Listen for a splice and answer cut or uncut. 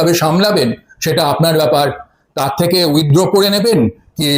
uncut